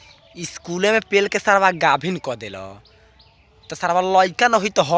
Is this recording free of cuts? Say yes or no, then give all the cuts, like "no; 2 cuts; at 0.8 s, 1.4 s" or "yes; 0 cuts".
yes; 0 cuts